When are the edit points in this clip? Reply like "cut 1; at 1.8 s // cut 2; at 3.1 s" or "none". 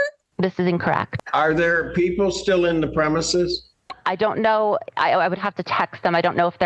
cut 1; at 1.1 s